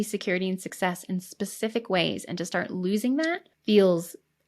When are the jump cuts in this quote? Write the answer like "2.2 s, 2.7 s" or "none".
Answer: 3.5 s